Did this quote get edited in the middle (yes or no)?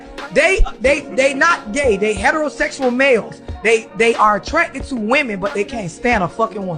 no